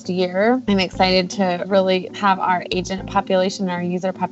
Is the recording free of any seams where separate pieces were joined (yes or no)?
yes